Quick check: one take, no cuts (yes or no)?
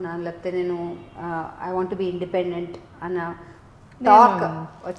yes